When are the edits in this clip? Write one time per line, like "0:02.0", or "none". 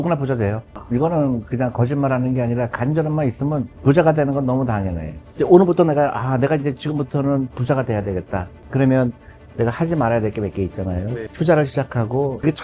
0:05.3